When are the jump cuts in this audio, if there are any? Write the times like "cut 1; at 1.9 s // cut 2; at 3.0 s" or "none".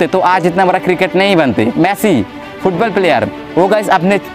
cut 1; at 1.7 s